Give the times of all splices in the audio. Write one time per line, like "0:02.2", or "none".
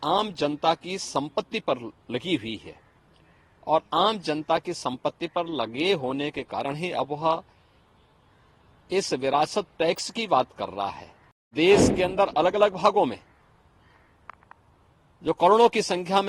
0:11.5